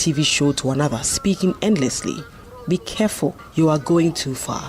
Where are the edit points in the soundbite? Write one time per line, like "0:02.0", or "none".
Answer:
0:03.4